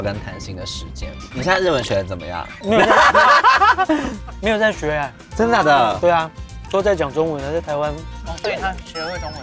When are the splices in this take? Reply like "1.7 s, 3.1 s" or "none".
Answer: 2.6 s, 6.6 s